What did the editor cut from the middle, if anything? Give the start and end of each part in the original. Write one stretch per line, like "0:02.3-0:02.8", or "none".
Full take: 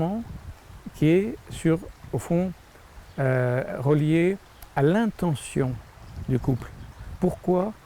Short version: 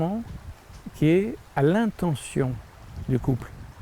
0:01.4-0:04.6